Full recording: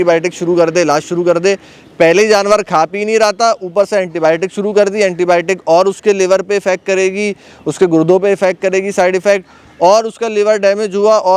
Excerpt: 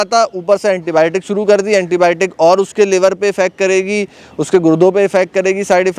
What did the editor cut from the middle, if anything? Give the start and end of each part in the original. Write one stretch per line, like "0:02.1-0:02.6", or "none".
none